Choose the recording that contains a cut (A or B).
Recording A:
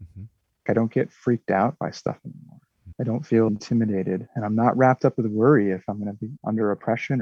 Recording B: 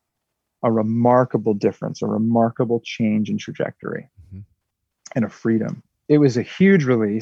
B